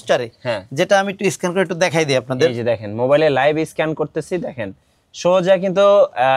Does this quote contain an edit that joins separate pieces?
no; 0 cuts

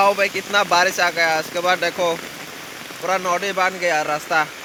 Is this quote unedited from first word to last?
yes; 0 cuts

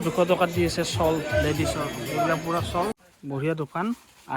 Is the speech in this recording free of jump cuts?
no; 1 cut; at 3.0 s

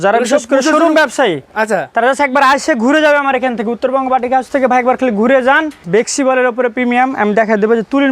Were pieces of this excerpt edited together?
yes; 1 cut; at 5.8 s

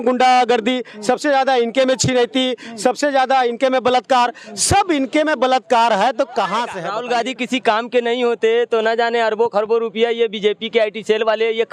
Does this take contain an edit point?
yes; 1 cut; at 6.8 s

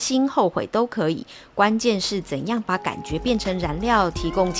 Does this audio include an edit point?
no; 0 cuts

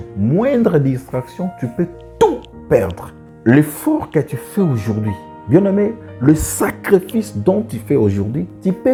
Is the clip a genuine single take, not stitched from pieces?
yes; 0 cuts

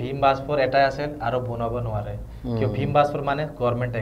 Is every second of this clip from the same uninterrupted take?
yes; 0 cuts

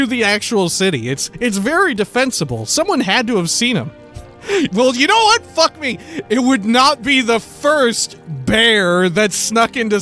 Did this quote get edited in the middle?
yes; 1 cut; at 1.2 s

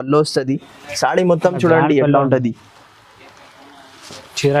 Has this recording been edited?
no; 0 cuts

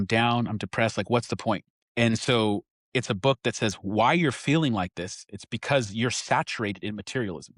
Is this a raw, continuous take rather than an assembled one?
no; 1 cut; at 1.8 s

